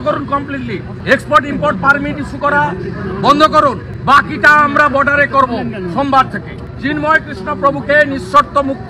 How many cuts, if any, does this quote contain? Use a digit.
3